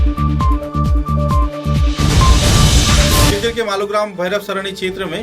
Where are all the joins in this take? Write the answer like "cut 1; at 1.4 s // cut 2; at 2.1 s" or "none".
cut 1; at 3.3 s